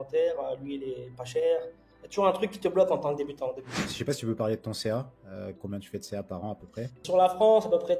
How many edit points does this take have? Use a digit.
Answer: 2